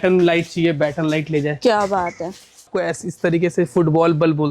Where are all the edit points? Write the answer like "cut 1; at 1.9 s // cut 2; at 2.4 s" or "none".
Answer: cut 1; at 2.7 s